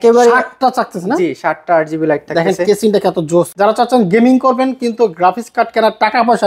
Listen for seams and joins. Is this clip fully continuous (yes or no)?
no